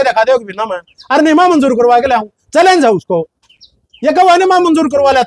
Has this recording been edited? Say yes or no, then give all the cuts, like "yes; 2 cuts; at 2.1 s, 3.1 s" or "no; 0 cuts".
no; 0 cuts